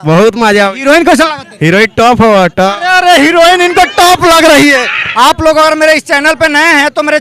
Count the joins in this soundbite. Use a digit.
1